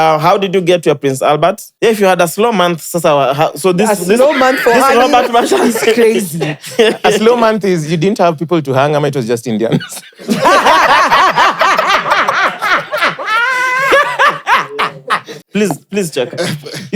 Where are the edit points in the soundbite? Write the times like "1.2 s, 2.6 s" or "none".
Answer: 1.7 s, 15.3 s